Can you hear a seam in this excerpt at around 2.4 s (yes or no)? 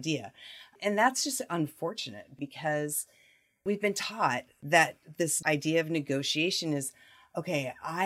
yes